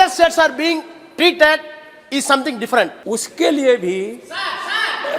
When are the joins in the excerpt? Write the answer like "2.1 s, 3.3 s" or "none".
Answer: 3.0 s